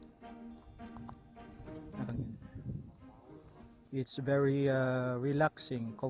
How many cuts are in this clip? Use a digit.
1